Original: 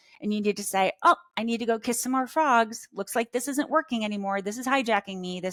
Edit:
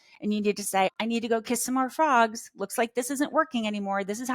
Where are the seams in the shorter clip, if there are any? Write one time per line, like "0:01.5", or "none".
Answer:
0:00.9